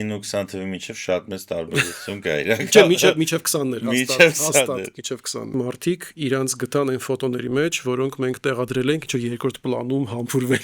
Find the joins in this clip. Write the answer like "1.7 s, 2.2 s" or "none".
5.5 s